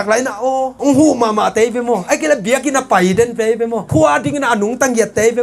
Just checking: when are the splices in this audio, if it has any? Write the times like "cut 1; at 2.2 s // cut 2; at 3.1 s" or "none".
cut 1; at 3.9 s